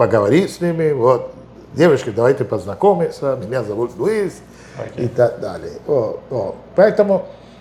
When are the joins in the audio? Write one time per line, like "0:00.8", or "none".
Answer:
none